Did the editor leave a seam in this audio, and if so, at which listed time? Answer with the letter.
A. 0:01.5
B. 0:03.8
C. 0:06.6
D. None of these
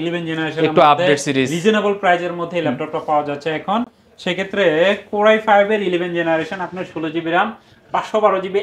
D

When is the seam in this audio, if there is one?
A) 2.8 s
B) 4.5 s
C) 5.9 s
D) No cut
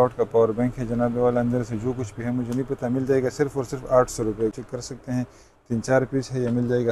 B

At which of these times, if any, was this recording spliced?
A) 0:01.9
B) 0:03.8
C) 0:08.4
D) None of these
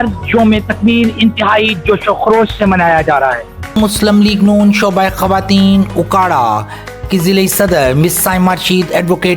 B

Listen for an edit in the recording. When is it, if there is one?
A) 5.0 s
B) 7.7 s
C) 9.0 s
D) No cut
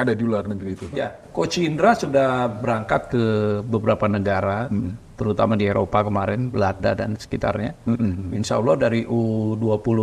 B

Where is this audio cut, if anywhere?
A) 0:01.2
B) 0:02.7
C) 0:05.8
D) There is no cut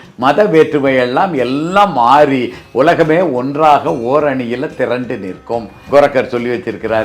C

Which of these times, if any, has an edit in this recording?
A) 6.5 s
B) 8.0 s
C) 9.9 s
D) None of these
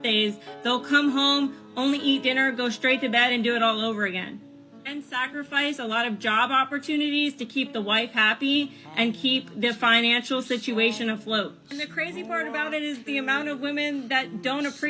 A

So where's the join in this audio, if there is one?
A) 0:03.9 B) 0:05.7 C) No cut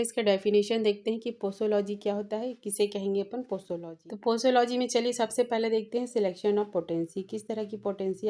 A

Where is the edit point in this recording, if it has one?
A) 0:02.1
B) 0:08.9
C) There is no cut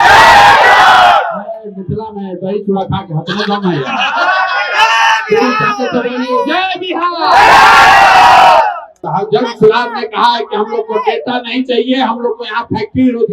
B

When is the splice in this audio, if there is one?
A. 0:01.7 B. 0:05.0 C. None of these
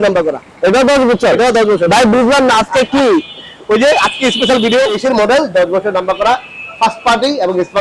B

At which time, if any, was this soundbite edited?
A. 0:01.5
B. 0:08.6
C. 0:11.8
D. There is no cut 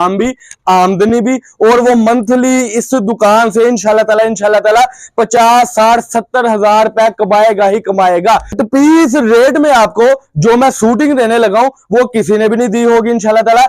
B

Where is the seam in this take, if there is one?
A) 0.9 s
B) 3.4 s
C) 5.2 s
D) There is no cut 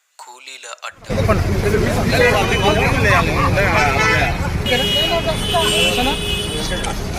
A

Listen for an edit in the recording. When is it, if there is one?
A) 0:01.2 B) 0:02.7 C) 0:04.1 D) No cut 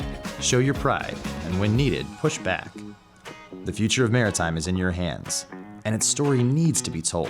B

